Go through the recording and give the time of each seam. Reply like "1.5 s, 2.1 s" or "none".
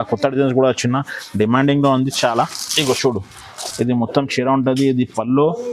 none